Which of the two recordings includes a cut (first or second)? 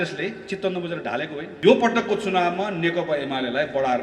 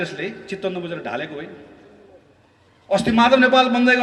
first